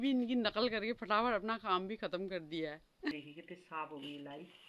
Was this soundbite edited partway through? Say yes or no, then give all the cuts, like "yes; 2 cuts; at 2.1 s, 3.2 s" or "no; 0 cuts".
yes; 1 cut; at 3.1 s